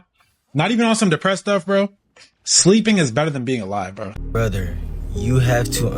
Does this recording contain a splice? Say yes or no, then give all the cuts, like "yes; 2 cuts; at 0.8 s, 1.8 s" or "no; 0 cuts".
yes; 1 cut; at 4.1 s